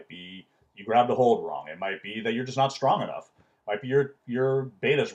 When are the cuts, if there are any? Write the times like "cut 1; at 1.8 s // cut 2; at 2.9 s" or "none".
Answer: none